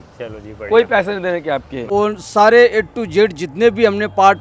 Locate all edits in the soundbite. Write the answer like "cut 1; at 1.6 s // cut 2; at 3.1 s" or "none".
cut 1; at 1.9 s